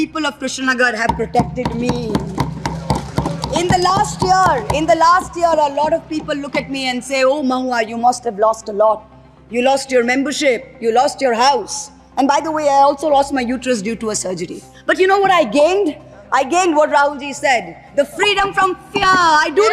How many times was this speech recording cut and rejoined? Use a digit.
0